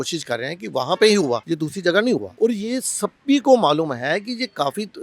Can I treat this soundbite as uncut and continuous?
no; 2 cuts; at 1.4 s, 2.3 s

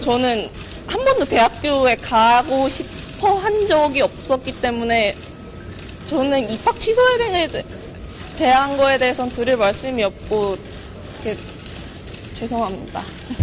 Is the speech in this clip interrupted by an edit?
no; 0 cuts

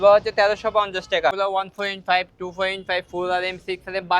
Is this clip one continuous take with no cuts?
no; 1 cut; at 1.3 s

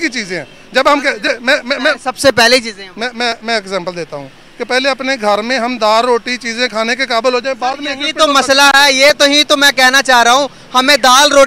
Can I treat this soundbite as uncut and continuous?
yes; 0 cuts

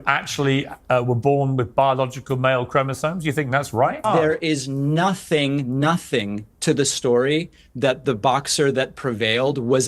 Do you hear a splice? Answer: yes; 1 cut; at 4.0 s

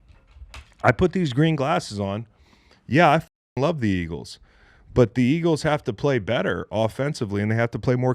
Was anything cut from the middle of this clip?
no; 0 cuts

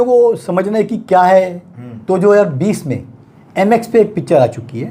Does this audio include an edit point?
no; 0 cuts

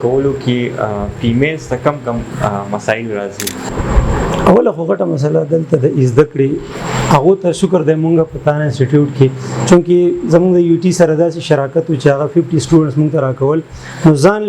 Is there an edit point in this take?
yes; 1 cut; at 3.6 s

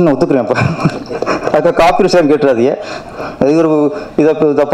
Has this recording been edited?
no; 0 cuts

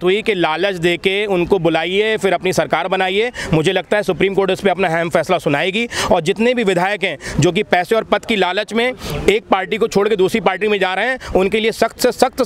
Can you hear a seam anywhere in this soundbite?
no; 0 cuts

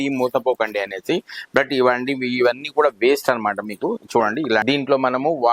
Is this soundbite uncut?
no; 1 cut; at 4.6 s

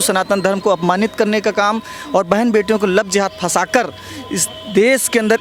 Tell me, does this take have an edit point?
no; 0 cuts

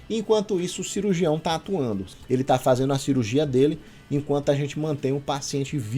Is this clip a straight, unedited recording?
no; 1 cut; at 2.0 s

